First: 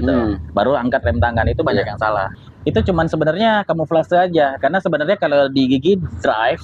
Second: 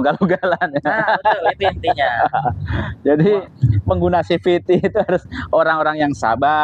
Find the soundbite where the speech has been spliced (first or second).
first